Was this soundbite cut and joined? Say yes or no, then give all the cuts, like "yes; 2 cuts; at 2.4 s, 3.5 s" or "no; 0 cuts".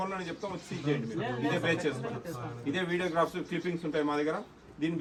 no; 0 cuts